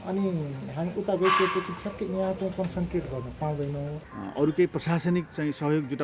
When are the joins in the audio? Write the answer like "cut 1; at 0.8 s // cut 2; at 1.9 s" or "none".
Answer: cut 1; at 4.0 s